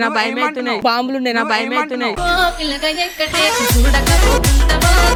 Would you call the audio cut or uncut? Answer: uncut